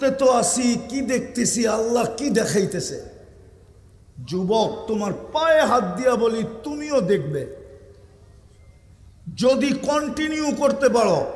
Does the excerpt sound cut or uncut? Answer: uncut